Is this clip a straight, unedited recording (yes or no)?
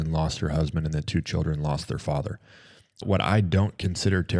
no